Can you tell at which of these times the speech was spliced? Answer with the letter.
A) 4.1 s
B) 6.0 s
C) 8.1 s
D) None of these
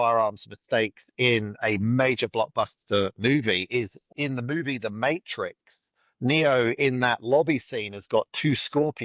A